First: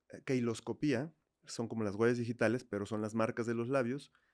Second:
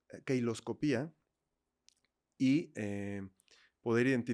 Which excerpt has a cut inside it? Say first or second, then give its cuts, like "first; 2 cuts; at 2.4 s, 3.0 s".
first; 1 cut; at 1.6 s